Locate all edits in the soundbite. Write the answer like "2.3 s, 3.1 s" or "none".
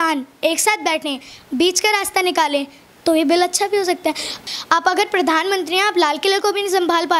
4.4 s